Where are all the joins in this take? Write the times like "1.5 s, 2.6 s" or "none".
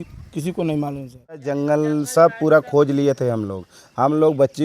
1.5 s